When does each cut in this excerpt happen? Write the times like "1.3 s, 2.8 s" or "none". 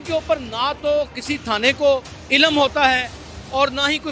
2.2 s